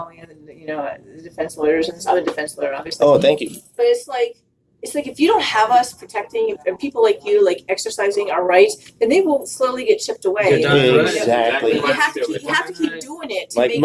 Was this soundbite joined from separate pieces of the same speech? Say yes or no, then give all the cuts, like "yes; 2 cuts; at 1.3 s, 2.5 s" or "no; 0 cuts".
no; 0 cuts